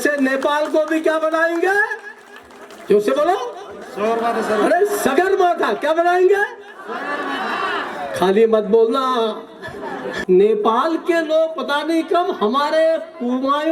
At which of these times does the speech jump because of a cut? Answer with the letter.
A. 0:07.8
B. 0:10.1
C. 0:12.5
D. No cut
B